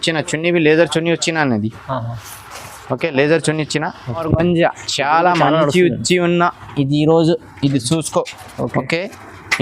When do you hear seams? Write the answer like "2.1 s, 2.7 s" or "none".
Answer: 4.2 s